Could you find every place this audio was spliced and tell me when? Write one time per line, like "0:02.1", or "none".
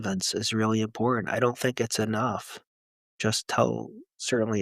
0:03.1